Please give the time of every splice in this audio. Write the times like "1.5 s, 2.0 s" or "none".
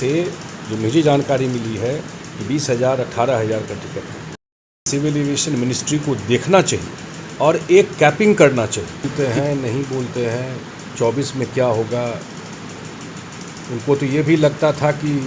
4.9 s, 9.1 s

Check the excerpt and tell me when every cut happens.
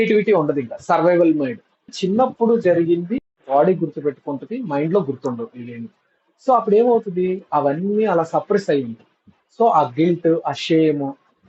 1.9 s

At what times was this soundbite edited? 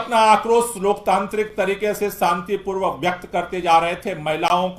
none

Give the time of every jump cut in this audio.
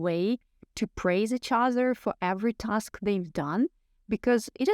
none

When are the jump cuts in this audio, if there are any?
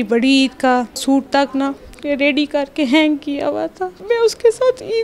1.0 s, 3.9 s

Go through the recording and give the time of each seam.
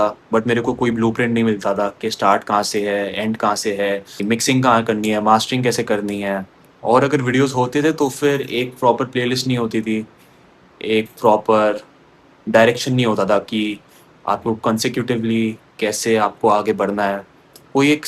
none

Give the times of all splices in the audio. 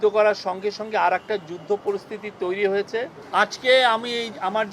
3.2 s

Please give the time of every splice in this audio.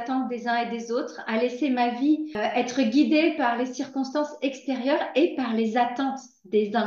2.4 s

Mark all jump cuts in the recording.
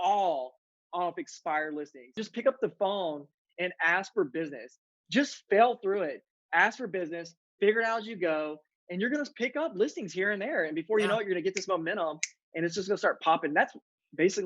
2.2 s

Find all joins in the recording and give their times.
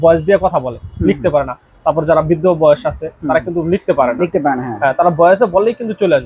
none

